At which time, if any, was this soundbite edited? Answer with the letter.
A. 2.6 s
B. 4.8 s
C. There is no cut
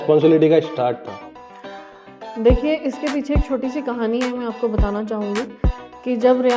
C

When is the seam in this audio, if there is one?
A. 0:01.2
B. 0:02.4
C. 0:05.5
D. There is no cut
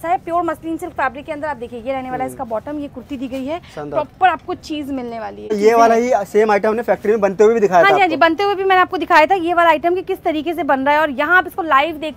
C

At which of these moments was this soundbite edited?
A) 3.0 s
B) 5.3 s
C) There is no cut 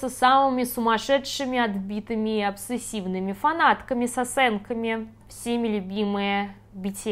B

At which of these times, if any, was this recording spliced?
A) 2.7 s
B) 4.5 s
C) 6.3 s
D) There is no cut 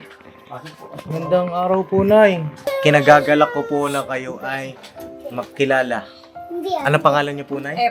A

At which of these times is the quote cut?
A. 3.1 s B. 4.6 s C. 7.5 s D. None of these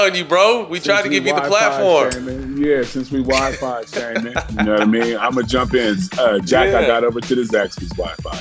C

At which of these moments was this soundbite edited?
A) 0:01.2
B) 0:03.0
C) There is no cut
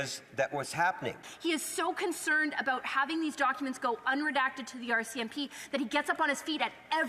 A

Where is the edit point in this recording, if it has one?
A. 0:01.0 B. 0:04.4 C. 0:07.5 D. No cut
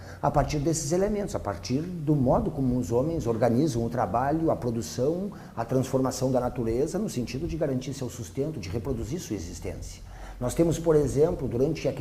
C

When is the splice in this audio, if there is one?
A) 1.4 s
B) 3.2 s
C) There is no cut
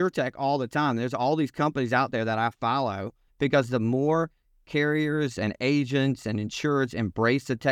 B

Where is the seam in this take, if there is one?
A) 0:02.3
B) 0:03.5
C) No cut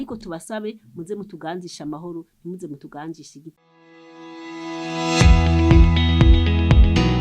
B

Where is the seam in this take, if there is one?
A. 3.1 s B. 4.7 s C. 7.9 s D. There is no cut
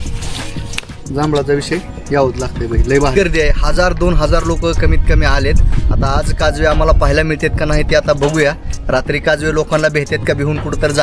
A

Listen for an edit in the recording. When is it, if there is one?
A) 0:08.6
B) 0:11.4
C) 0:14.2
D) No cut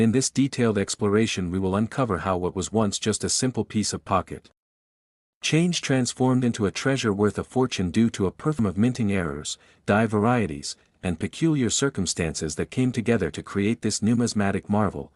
A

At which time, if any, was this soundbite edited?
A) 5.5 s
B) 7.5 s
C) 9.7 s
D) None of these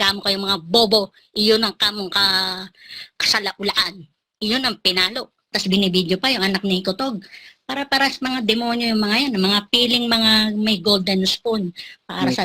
A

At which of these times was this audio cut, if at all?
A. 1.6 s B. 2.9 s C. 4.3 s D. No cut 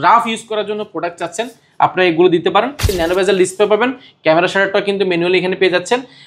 B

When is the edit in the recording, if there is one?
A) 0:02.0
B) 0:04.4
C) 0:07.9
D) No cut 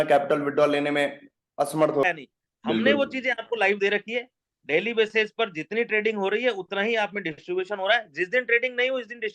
A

